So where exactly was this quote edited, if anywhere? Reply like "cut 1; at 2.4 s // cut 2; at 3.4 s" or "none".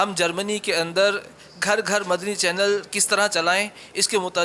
none